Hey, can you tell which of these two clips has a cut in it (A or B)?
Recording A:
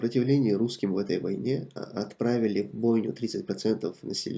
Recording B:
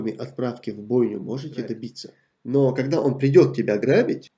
B